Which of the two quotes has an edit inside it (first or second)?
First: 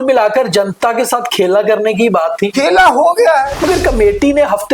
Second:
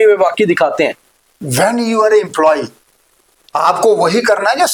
first